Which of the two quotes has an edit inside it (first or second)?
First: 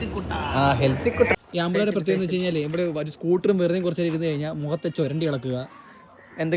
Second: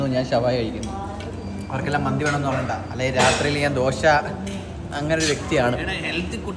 first